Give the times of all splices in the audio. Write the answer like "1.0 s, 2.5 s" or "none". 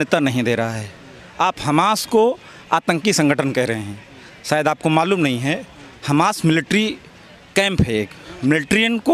8.2 s